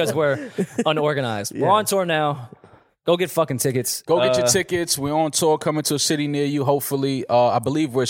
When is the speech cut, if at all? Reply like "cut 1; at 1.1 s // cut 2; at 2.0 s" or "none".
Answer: none

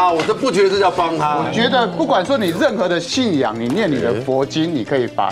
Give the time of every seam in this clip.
cut 1; at 1.5 s

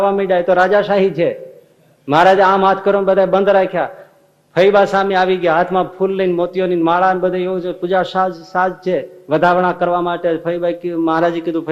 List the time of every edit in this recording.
none

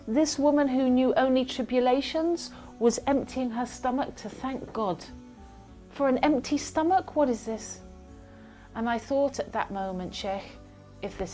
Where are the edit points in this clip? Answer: none

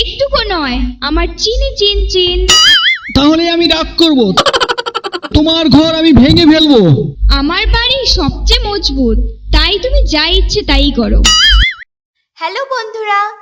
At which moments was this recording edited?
cut 1; at 11.8 s

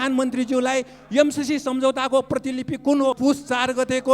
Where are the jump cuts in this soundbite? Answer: cut 1; at 3.2 s

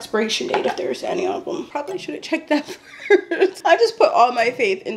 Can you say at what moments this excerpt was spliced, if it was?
cut 1; at 1.7 s // cut 2; at 3.6 s

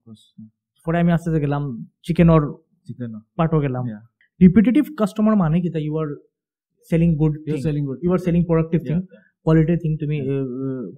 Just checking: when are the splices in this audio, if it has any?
cut 1; at 4.2 s

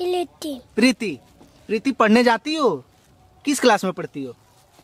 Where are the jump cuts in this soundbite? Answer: none

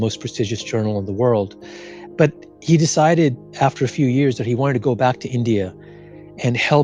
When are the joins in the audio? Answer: none

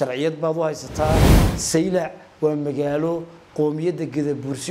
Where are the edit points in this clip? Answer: cut 1; at 1.4 s

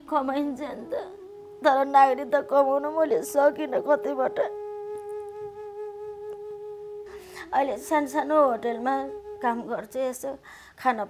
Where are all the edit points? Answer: cut 1; at 4.5 s // cut 2; at 6.9 s

